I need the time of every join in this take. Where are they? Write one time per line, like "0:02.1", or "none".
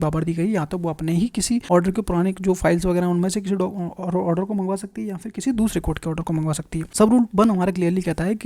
0:01.6
0:06.8